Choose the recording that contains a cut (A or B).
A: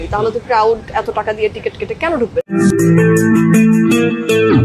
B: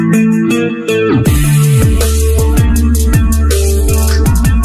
A